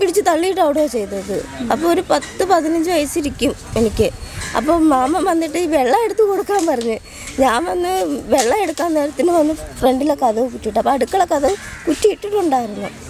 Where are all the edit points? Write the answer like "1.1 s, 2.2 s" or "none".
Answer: none